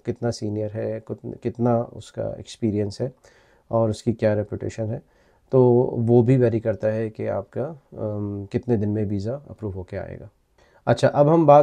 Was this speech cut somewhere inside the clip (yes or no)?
no